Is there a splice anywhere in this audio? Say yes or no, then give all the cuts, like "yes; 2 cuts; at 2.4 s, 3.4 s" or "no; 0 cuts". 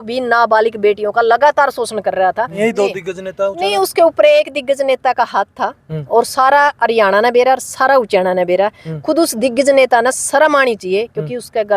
yes; 1 cut; at 2.6 s